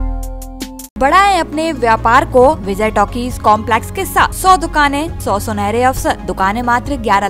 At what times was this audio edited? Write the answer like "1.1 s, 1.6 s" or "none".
1.0 s, 2.7 s, 4.4 s, 5.1 s, 6.3 s

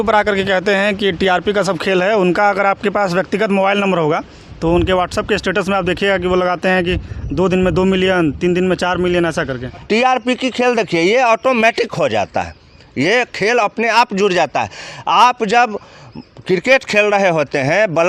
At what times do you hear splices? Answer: 9.8 s

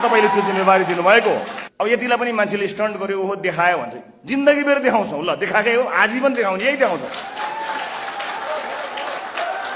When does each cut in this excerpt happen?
1.6 s

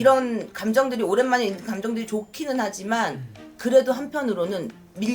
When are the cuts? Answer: none

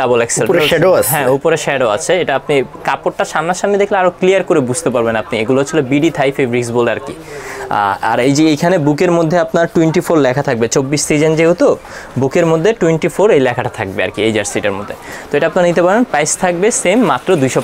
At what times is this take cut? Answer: none

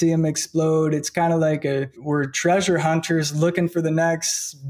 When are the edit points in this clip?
1.9 s

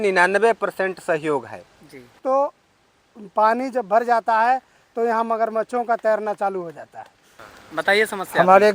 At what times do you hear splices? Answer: 2.2 s, 7.6 s

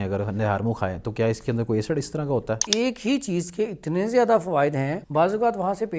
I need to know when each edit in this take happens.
2.6 s, 5.0 s

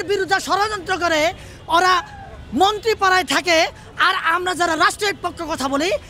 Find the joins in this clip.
none

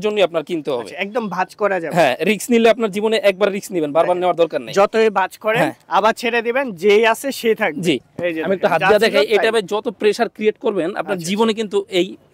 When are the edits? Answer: none

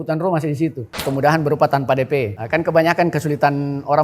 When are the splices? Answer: 1.0 s, 2.4 s

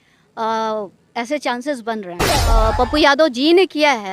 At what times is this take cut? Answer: 2.5 s

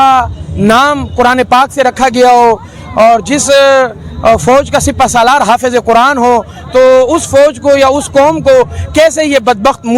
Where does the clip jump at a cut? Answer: none

